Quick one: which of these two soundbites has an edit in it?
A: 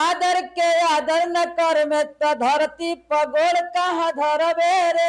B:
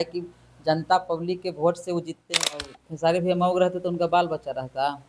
B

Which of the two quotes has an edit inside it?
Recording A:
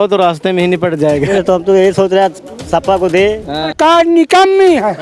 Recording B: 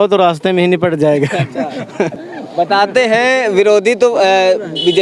A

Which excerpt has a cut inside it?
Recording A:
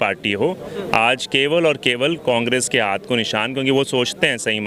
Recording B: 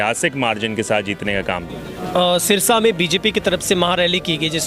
B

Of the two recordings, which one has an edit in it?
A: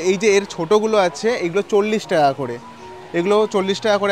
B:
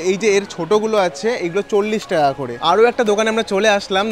B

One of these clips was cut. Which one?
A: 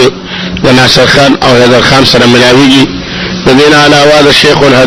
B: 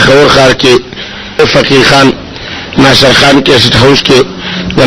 B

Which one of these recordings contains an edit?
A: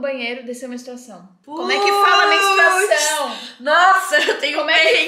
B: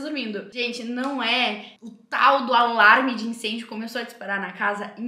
A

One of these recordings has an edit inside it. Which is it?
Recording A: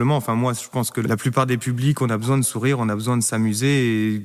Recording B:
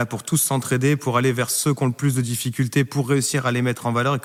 A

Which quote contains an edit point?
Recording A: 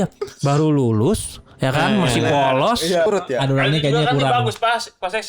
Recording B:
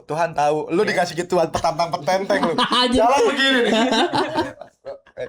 A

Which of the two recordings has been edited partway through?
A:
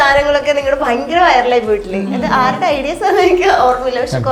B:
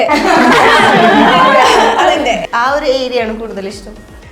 B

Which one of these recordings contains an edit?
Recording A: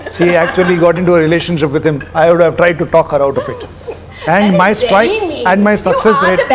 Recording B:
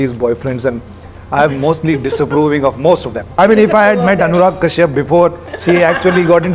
B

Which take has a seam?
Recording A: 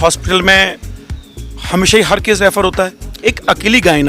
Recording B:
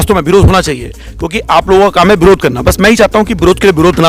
A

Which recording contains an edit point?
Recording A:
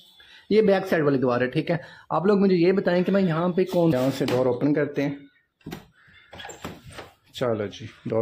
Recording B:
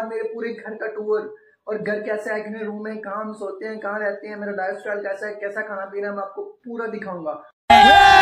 A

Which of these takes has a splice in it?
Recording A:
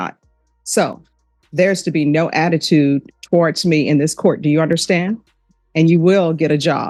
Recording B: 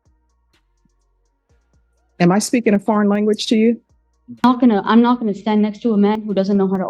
B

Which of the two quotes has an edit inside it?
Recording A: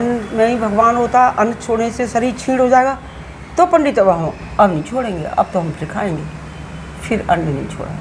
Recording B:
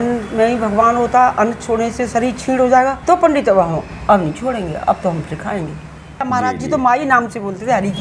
B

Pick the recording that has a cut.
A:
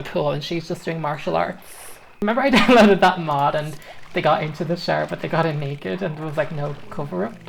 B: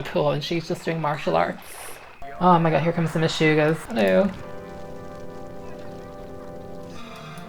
B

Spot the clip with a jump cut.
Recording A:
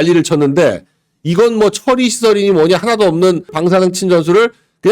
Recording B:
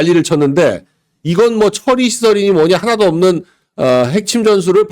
A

